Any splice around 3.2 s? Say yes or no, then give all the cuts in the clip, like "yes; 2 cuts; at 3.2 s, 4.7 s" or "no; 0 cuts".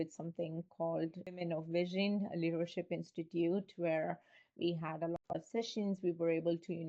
no; 1 cut; at 1.2 s